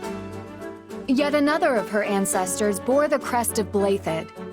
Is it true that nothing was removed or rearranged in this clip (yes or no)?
no